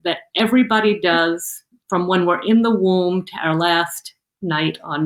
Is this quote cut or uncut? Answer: uncut